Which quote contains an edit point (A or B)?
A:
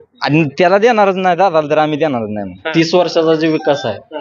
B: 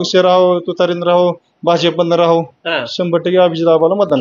A